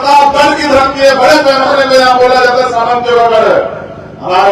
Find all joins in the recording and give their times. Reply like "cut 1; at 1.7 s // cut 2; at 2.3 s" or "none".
none